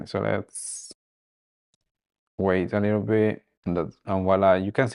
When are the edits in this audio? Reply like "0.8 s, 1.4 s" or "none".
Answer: 3.5 s